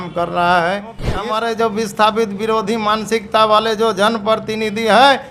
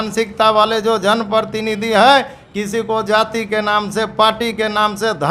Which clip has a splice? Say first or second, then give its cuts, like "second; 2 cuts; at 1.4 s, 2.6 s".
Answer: first; 1 cut; at 1.2 s